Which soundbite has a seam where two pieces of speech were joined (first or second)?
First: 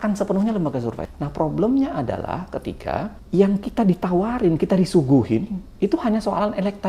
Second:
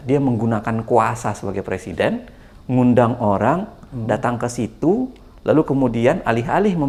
first